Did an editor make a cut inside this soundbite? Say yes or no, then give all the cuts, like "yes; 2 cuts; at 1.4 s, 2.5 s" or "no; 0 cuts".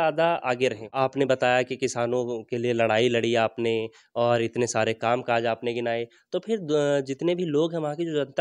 yes; 1 cut; at 0.9 s